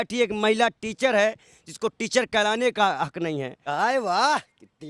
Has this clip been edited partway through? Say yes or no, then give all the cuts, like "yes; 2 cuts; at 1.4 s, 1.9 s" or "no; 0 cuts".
yes; 1 cut; at 3.6 s